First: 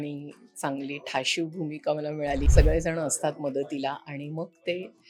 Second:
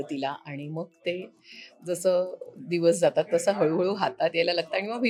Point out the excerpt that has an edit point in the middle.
first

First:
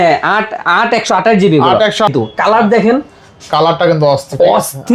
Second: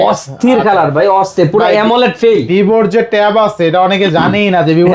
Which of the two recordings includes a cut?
first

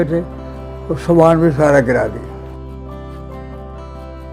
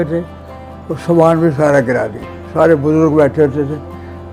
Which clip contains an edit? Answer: second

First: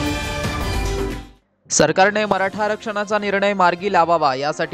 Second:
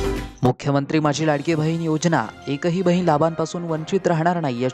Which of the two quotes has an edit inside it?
first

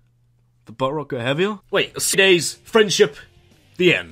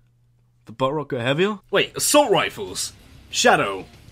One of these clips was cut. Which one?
second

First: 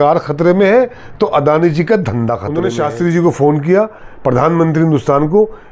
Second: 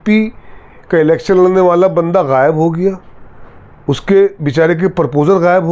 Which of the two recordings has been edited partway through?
first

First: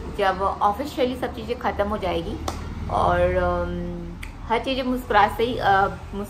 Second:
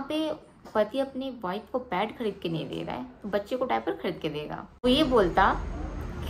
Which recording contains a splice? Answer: second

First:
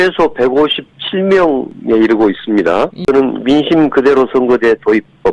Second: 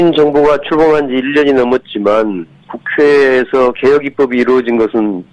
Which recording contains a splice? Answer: first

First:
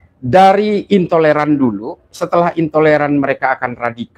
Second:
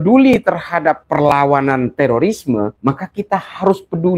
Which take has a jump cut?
second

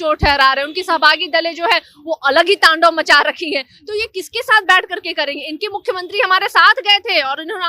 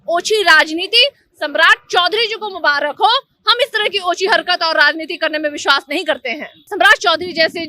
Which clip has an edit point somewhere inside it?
second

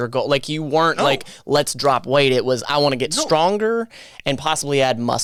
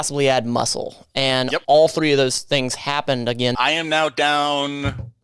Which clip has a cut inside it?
second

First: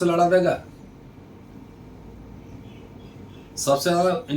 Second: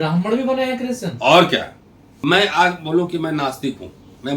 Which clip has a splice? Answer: second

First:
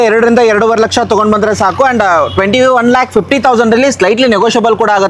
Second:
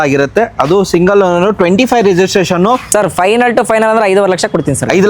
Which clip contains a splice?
second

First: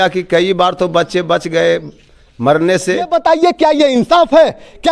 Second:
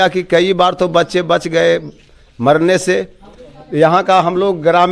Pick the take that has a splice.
first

